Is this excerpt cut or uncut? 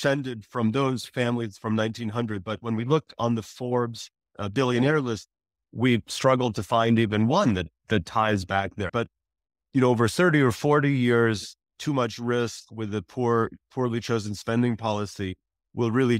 cut